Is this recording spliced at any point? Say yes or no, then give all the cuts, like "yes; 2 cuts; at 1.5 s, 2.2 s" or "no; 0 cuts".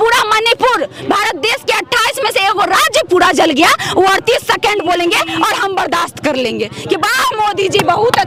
no; 0 cuts